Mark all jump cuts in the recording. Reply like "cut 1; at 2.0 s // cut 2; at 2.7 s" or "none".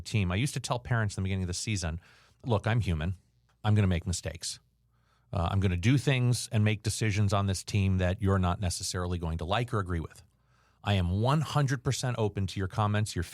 cut 1; at 2.4 s

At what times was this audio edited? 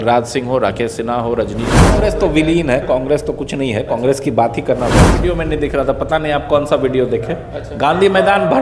cut 1; at 1.9 s // cut 2; at 5.2 s

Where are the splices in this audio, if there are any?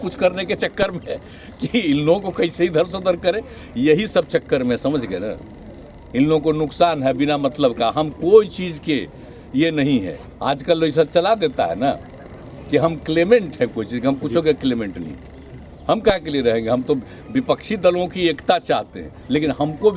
none

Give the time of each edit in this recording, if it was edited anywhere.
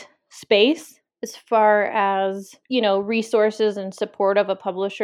cut 1; at 2.5 s

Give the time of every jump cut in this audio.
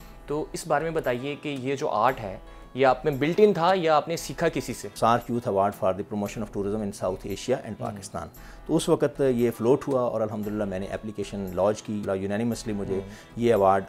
cut 1; at 4.8 s // cut 2; at 12.0 s

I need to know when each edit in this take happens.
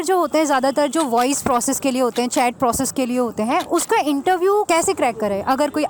none

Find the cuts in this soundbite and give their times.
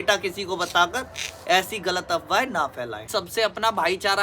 cut 1; at 3.1 s

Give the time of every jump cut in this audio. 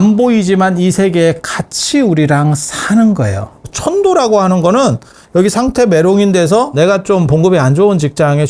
cut 1; at 3.7 s // cut 2; at 6.7 s

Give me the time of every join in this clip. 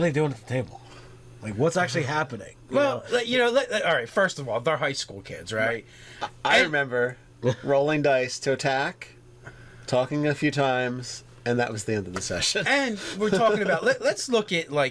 cut 1; at 7.0 s

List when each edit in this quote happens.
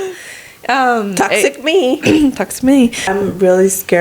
cut 1; at 3.0 s

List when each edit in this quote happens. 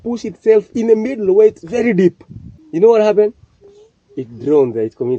none

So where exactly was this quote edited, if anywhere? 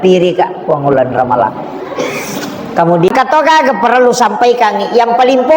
cut 1; at 3.1 s

